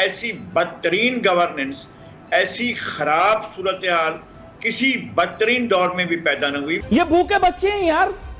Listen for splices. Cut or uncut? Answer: cut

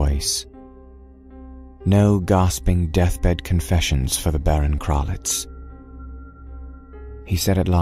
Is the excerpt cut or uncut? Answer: uncut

